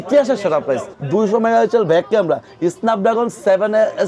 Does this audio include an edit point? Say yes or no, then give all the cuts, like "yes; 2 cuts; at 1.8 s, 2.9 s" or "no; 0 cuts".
yes; 1 cut; at 1.0 s